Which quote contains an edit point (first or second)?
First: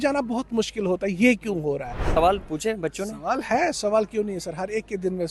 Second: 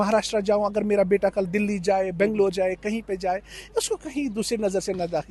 first